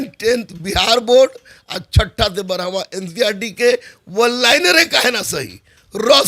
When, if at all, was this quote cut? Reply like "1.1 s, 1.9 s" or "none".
none